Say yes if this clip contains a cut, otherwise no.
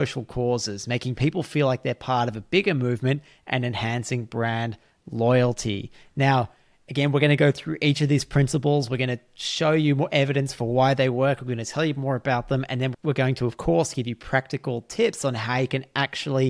yes